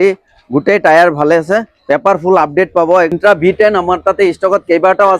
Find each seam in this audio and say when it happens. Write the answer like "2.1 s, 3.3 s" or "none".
3.1 s